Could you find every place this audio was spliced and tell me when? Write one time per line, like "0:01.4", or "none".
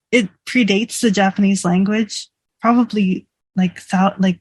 0:02.4